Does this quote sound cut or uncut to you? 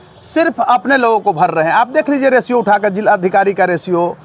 uncut